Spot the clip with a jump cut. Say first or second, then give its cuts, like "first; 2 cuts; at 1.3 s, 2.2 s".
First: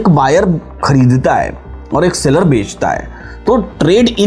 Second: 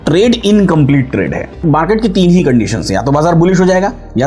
second; 1 cut; at 1.6 s